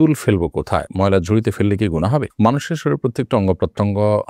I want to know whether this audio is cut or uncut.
uncut